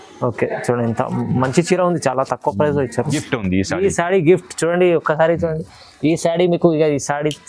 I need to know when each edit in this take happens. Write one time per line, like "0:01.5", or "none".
0:03.2